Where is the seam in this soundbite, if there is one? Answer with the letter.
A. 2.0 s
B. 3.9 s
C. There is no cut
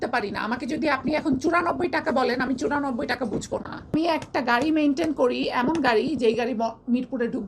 B